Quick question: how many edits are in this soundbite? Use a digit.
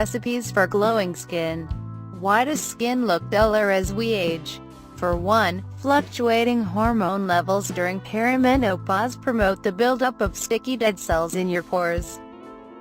1